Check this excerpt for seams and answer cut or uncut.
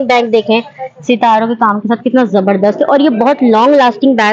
uncut